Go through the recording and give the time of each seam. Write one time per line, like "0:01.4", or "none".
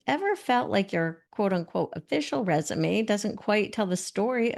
0:01.2